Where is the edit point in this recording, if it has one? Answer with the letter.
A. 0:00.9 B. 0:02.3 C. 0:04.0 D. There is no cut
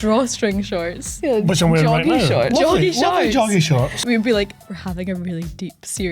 C